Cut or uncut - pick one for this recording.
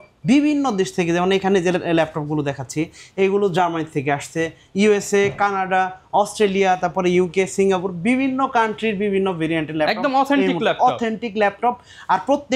uncut